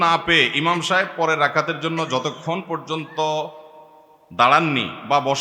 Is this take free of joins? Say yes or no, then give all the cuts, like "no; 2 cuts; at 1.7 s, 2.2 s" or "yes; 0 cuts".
yes; 0 cuts